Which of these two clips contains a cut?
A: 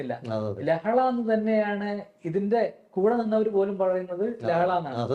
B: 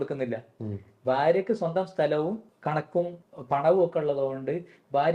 B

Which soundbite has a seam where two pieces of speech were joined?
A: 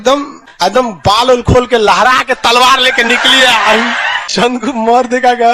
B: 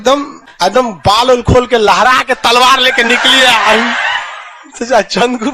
A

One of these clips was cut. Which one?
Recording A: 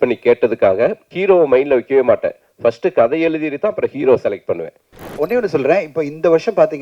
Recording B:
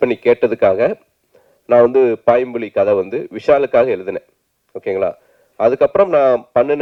A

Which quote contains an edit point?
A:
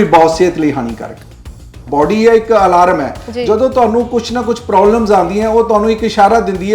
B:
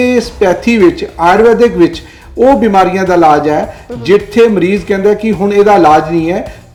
A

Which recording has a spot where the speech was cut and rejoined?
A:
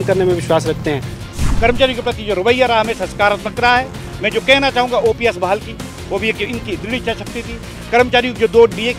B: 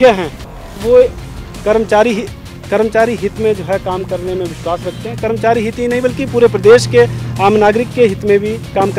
A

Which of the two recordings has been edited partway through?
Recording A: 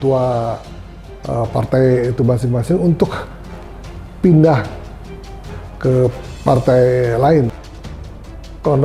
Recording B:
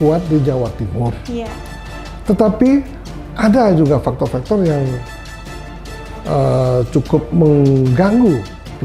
A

